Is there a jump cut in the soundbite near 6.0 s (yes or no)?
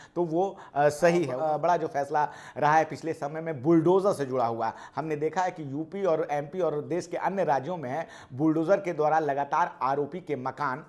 no